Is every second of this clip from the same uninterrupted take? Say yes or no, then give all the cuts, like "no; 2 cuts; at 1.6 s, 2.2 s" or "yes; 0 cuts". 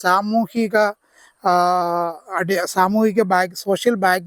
yes; 0 cuts